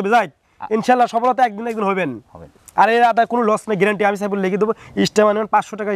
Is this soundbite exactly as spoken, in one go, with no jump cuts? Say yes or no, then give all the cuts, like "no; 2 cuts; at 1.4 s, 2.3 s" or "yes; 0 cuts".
yes; 0 cuts